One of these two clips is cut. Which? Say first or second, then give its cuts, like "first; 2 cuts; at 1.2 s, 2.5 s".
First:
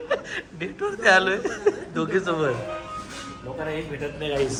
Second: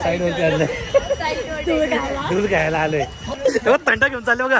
second; 1 cut; at 3.4 s